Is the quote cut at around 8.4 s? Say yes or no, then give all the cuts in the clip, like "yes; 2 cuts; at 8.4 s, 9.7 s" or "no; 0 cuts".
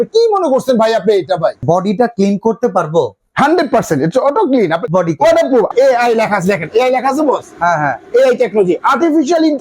no; 3 cuts; at 1.6 s, 4.8 s, 5.7 s